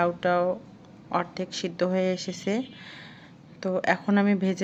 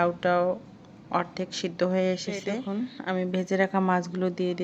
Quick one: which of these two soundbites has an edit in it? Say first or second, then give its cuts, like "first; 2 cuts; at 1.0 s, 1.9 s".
second; 1 cut; at 3.0 s